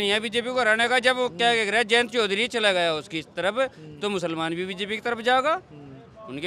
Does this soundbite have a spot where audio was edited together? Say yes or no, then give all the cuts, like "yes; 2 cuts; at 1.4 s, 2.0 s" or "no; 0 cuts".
no; 0 cuts